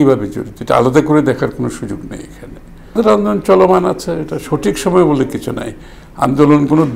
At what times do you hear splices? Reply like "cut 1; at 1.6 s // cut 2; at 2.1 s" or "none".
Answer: cut 1; at 3.0 s

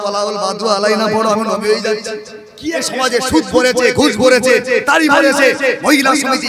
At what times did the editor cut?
cut 1; at 2.8 s

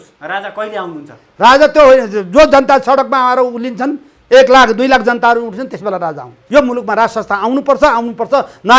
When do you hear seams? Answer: cut 1; at 6.4 s

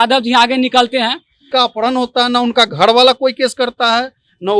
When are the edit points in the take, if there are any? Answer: cut 1; at 1.3 s

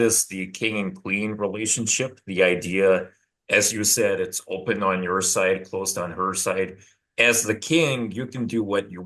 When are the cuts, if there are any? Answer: none

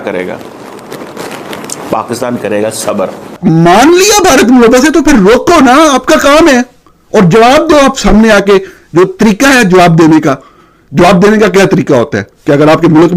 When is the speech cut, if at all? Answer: cut 1; at 3.4 s

